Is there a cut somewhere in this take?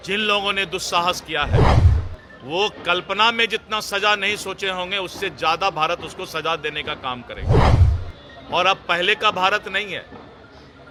no; 0 cuts

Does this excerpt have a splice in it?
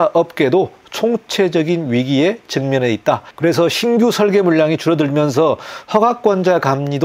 no; 0 cuts

